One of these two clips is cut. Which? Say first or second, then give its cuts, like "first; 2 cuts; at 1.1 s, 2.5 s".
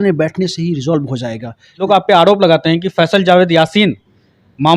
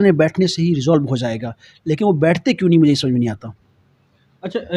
first; 1 cut; at 1.8 s